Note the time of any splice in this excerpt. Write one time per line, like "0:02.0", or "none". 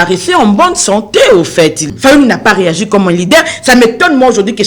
0:01.8

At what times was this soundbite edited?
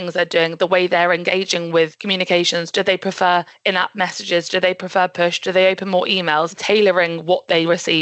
0:02.0
0:06.6

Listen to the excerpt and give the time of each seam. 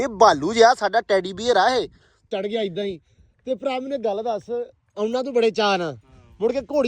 0:02.3

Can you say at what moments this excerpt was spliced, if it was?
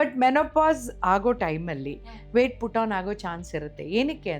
none

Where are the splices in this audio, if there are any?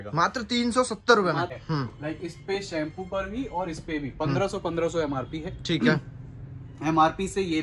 0:01.6

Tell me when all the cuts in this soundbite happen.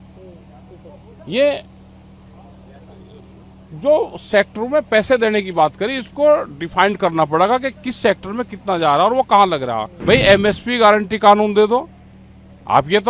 0:09.9

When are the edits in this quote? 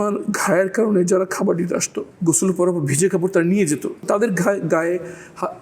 0:02.0
0:04.1

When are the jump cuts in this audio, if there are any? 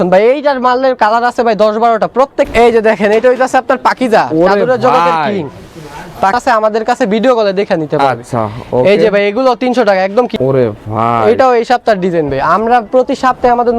0:02.5
0:06.3
0:10.3

